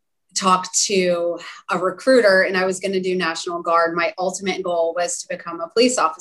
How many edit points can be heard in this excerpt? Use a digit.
0